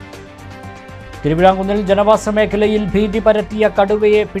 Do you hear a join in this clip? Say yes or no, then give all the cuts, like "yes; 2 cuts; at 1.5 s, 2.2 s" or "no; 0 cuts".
no; 0 cuts